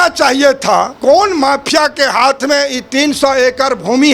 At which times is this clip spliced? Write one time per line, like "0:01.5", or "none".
0:00.9